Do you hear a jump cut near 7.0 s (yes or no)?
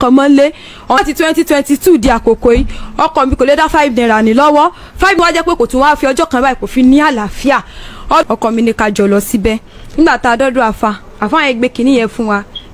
no